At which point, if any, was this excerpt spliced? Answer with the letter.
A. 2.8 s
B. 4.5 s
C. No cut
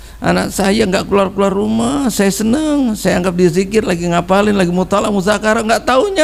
C